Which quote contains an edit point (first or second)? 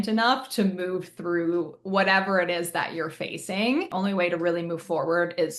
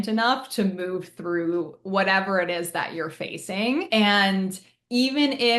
first